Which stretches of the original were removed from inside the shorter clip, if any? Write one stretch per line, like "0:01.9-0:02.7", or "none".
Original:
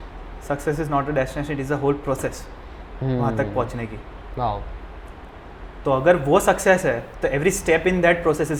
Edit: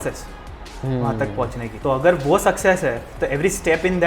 0:03.9-0:05.7